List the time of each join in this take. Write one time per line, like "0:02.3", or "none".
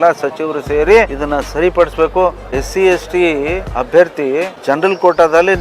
0:01.2
0:02.6
0:03.7
0:04.5

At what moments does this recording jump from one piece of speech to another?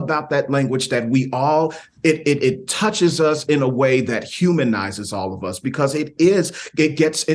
none

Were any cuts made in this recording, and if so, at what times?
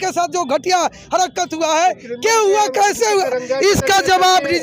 none

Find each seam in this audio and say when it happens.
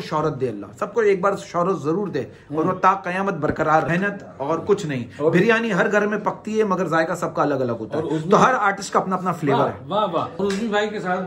0:03.9
0:10.3

